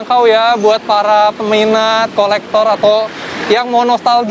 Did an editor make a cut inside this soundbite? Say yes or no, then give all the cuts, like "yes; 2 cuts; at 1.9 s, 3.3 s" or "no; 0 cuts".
no; 0 cuts